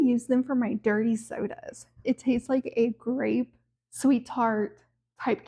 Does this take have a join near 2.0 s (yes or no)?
yes